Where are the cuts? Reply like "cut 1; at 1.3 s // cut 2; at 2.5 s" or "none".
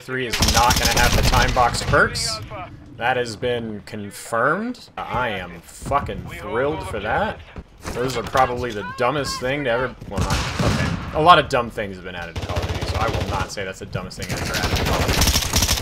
none